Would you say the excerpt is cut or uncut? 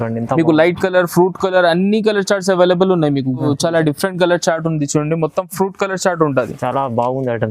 cut